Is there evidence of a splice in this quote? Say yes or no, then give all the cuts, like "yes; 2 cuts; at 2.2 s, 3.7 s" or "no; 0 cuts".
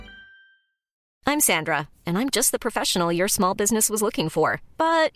yes; 1 cut; at 1.0 s